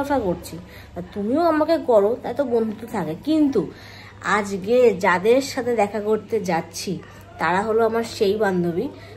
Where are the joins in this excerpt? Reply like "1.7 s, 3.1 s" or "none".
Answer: none